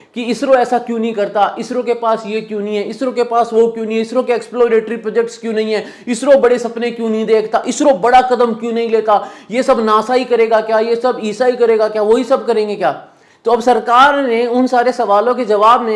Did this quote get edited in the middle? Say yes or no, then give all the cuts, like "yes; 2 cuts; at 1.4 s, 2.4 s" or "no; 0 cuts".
no; 0 cuts